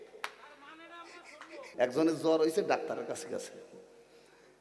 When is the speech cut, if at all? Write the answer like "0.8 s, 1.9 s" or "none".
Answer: 1.7 s